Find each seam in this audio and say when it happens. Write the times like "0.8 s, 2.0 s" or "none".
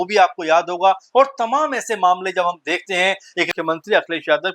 3.5 s